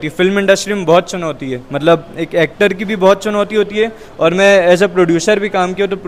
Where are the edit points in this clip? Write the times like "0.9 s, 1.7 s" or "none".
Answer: none